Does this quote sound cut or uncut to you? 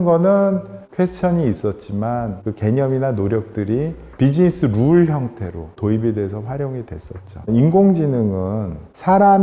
uncut